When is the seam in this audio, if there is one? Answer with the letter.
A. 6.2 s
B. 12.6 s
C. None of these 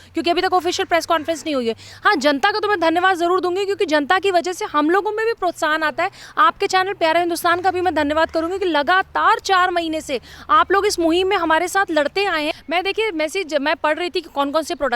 B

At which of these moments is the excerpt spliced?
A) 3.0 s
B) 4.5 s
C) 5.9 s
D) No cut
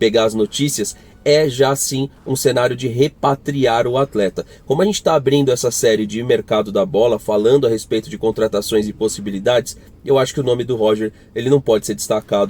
D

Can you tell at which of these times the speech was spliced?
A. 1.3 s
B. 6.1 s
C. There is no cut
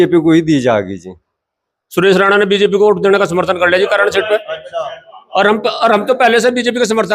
A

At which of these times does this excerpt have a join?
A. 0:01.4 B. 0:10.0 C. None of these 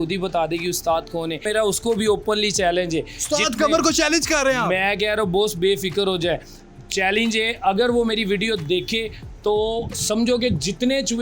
A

